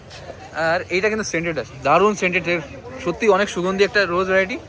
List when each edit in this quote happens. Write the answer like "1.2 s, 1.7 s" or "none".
none